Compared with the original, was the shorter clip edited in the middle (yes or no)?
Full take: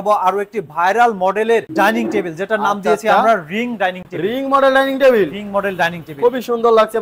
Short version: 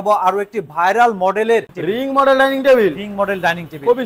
yes